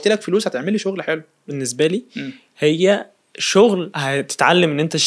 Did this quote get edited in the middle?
yes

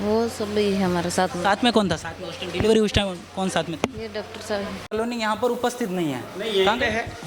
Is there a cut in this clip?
yes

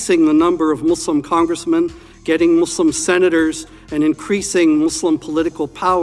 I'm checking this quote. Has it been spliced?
no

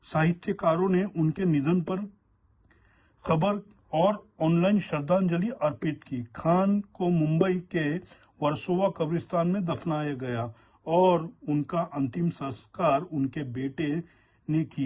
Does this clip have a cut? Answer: no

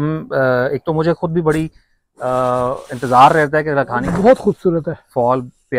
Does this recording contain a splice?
yes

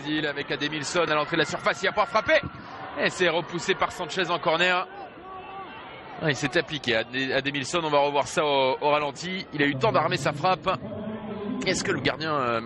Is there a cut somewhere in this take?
no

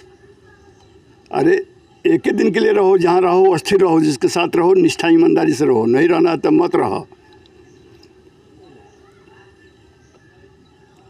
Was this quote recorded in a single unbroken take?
yes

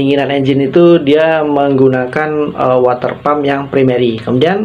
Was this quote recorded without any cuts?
yes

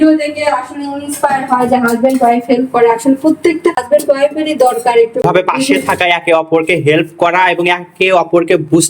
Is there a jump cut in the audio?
yes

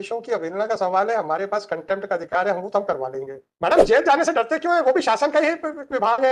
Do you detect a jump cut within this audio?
yes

